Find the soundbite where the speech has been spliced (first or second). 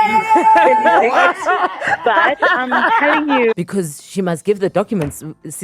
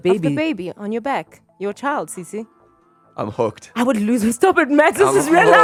first